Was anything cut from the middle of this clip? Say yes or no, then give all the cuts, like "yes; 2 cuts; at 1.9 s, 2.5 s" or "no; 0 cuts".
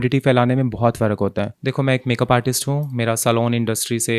yes; 1 cut; at 1.6 s